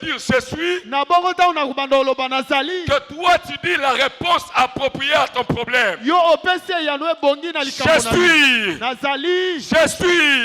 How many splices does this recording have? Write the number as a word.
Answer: zero